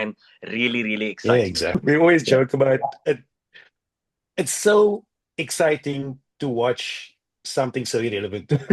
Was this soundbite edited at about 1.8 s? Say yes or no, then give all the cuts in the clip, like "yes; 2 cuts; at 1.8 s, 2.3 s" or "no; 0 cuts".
yes; 1 cut; at 1.8 s